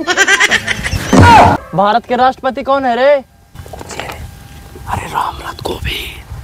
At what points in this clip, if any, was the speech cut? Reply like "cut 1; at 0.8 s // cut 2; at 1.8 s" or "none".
cut 1; at 1.6 s // cut 2; at 3.5 s

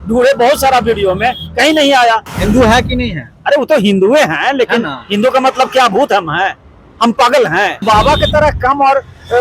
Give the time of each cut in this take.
cut 1; at 2.3 s // cut 2; at 7.8 s

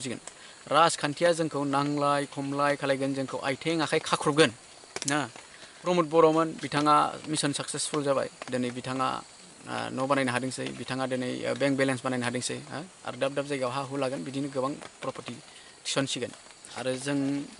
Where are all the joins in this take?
cut 1; at 5.8 s // cut 2; at 16.7 s

